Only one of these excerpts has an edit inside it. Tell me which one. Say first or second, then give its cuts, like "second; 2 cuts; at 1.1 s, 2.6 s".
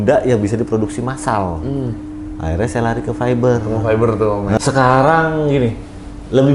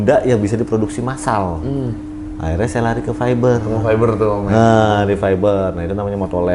first; 1 cut; at 4.6 s